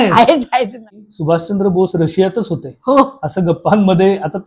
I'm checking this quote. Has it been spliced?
yes; 1 cut; at 1.0 s

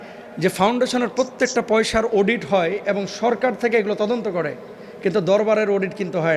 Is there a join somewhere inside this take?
no; 0 cuts

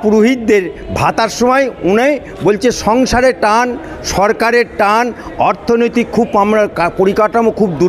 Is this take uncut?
yes; 0 cuts

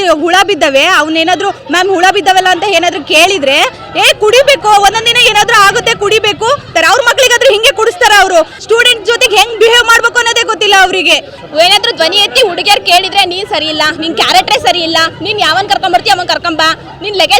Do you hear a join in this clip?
yes; 3 cuts; at 6.7 s, 8.6 s, 11.3 s

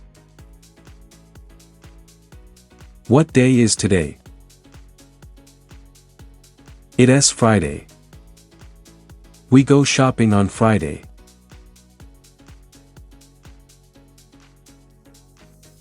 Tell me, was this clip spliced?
no; 0 cuts

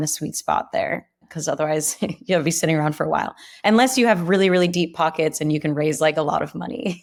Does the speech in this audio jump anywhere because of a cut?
no; 0 cuts

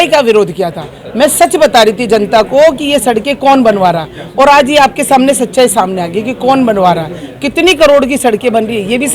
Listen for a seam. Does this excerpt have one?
no; 0 cuts

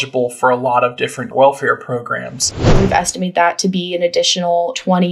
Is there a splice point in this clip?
yes; 2 cuts; at 1.2 s, 2.7 s

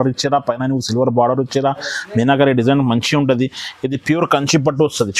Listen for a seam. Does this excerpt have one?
no; 0 cuts

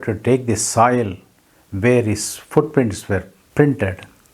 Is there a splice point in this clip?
yes; 1 cut; at 3.4 s

